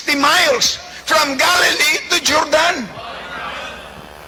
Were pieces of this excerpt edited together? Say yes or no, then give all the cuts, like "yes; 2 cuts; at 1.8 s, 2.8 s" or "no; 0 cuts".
no; 0 cuts